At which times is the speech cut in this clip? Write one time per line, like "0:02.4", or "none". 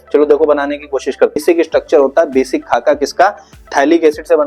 0:01.4